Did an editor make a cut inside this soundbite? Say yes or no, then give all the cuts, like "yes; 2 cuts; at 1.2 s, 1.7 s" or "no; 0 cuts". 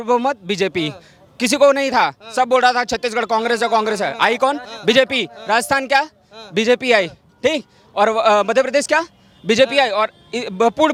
no; 0 cuts